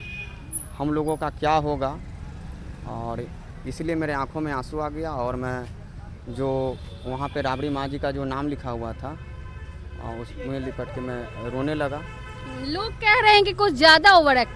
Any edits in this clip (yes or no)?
no